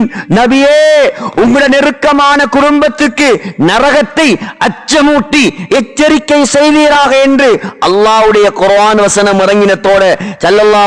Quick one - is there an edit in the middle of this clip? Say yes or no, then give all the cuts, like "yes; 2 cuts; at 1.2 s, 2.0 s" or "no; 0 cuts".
no; 0 cuts